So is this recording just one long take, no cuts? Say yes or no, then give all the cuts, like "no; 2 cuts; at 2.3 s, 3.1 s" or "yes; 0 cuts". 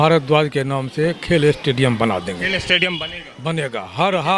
yes; 0 cuts